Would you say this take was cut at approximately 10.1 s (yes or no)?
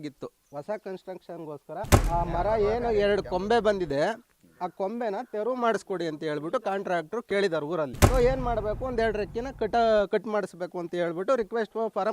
no